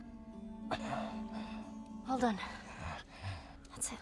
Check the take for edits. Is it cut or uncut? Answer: uncut